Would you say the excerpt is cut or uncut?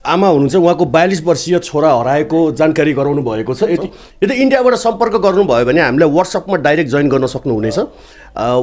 cut